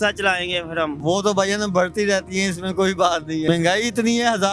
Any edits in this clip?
yes; 2 cuts; at 1.0 s, 3.4 s

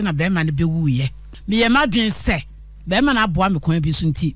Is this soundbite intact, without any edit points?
no; 1 cut; at 1.3 s

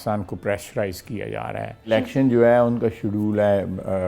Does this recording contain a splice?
yes; 1 cut; at 1.9 s

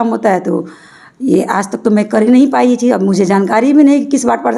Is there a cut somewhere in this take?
no; 0 cuts

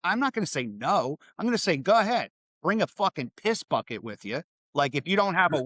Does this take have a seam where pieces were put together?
yes; 1 cut; at 4.6 s

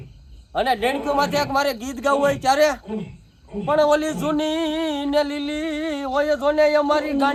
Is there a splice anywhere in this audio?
no; 0 cuts

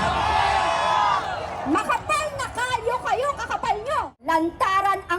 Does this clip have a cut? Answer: yes; 1 cut; at 4.1 s

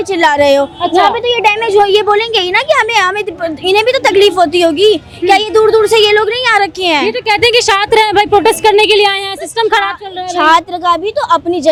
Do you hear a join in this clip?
no; 0 cuts

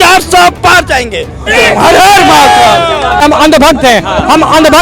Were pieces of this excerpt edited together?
yes; 2 cuts; at 1.5 s, 3.2 s

